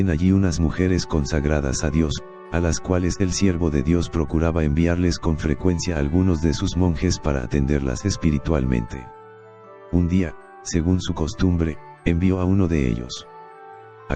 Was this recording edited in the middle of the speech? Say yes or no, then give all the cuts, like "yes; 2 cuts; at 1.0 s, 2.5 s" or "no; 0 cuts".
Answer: yes; 1 cut; at 8.0 s